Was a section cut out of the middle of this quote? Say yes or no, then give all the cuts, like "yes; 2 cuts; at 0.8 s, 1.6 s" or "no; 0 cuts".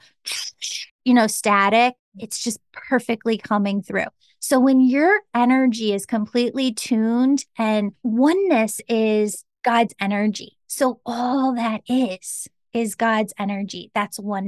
yes; 1 cut; at 8.0 s